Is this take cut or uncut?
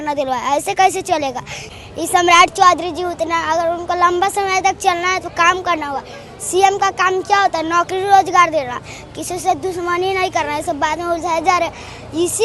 cut